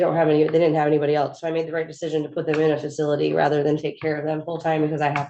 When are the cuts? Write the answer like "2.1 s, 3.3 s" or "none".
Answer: none

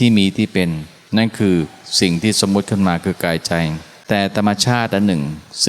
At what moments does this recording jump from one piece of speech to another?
0.9 s, 3.9 s

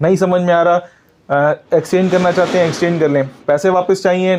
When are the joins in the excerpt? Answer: none

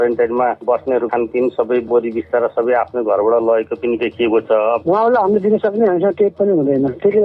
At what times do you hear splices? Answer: 1.0 s, 4.8 s

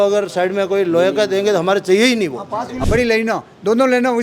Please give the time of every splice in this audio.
2.7 s

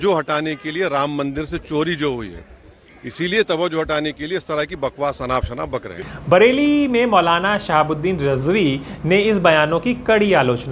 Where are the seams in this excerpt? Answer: none

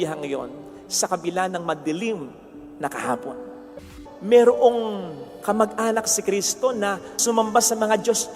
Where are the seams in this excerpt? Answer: 3.8 s, 7.2 s

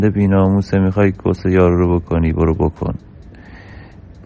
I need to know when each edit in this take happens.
none

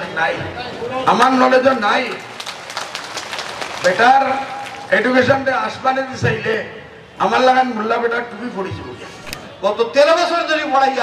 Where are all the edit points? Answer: 9.5 s

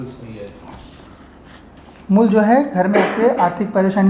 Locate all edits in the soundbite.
1.7 s

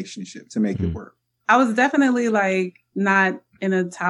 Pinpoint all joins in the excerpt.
1.4 s, 2.8 s

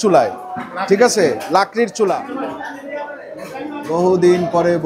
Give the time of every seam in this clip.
2.2 s, 3.8 s

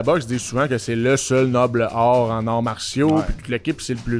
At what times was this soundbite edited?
none

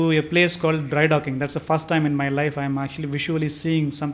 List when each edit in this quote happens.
none

